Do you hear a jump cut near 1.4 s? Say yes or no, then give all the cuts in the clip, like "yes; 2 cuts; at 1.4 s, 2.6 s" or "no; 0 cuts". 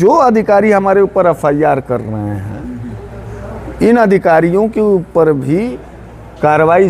no; 0 cuts